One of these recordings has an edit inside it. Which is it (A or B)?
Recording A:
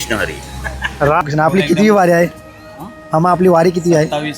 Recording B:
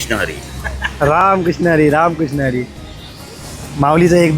A